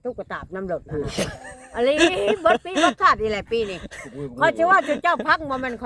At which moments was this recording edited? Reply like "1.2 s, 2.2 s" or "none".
none